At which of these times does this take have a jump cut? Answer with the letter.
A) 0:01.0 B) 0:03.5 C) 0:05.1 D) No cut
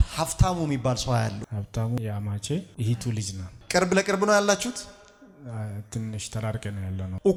D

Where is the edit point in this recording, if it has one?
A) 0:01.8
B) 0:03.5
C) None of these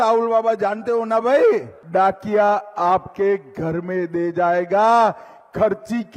A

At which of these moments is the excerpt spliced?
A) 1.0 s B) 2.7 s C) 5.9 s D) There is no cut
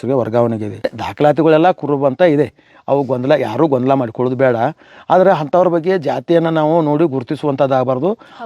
A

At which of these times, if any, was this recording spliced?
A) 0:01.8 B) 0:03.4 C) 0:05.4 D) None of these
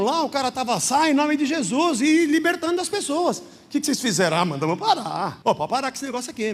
C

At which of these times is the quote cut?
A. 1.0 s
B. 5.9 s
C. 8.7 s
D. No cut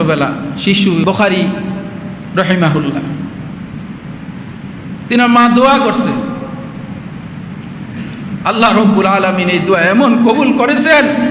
A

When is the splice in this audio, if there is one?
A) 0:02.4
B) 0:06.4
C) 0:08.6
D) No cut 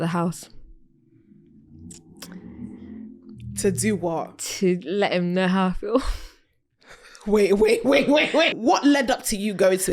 C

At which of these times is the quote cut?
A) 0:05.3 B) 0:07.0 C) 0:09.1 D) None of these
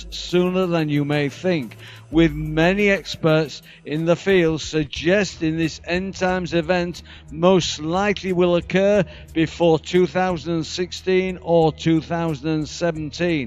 A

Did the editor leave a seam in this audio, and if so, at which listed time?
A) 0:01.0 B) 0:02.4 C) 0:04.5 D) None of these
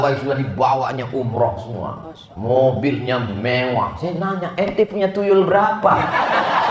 D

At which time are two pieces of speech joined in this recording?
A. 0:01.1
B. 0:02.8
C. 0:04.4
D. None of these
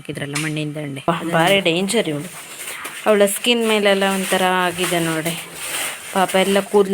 A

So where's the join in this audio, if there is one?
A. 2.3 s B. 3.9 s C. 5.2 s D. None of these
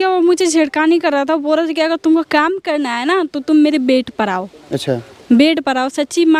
D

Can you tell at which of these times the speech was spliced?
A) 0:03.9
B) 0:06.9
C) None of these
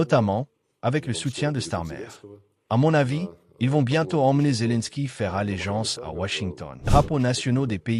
B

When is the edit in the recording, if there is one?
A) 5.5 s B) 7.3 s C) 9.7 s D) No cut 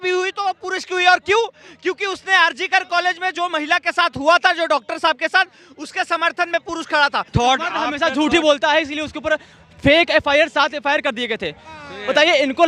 B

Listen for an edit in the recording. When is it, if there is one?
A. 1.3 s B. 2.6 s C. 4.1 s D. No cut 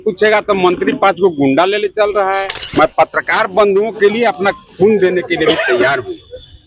B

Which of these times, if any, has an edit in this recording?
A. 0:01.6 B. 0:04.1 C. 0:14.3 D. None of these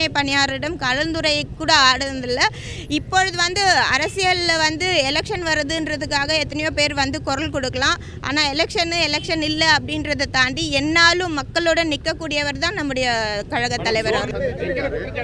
C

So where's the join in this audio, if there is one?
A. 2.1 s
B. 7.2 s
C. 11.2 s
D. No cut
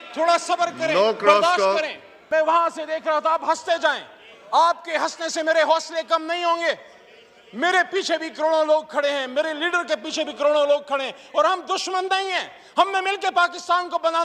A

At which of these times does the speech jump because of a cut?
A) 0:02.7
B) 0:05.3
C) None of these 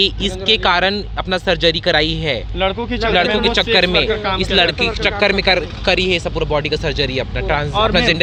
C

